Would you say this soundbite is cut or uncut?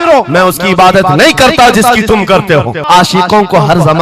cut